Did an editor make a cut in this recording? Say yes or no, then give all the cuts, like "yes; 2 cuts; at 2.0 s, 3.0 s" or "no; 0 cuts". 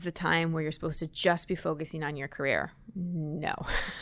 no; 0 cuts